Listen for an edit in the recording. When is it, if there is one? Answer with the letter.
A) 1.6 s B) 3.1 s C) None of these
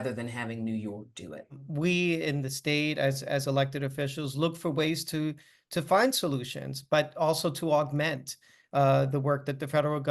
A